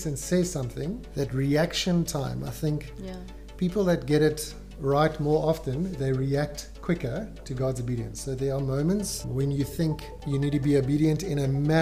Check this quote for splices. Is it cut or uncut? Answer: cut